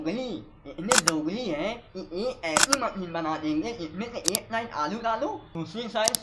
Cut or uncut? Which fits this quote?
uncut